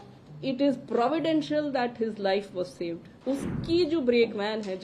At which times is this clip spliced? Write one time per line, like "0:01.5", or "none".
0:03.1